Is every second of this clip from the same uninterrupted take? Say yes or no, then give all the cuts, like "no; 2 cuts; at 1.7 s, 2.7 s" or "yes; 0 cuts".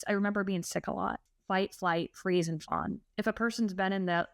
no; 2 cuts; at 1.3 s, 3.0 s